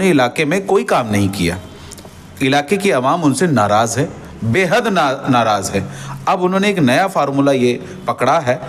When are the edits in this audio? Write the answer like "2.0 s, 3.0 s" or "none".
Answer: none